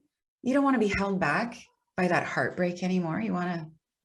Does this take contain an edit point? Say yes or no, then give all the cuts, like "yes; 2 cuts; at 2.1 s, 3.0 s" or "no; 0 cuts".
no; 0 cuts